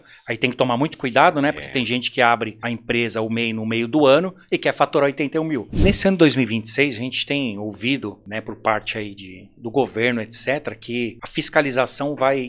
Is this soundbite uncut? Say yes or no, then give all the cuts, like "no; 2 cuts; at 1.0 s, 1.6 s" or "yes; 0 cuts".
no; 4 cuts; at 2.6 s, 5.8 s, 8.2 s, 11.2 s